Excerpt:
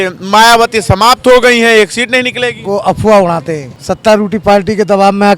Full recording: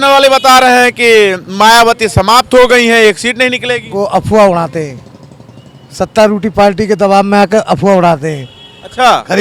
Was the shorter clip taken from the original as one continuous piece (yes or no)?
no